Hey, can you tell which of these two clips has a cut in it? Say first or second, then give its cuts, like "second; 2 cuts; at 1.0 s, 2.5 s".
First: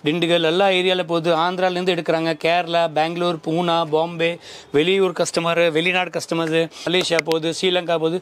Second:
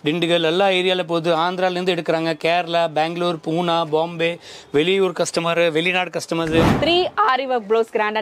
second; 1 cut; at 6.7 s